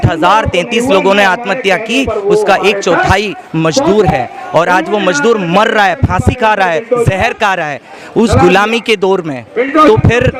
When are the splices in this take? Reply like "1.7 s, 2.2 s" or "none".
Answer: none